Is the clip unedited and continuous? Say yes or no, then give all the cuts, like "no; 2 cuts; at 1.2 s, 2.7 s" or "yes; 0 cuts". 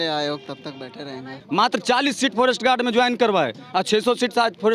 no; 1 cut; at 1.3 s